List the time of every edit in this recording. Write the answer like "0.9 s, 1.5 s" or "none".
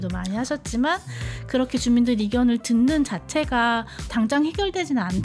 4.1 s